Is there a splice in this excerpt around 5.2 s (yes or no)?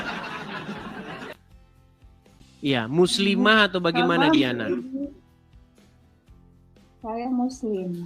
yes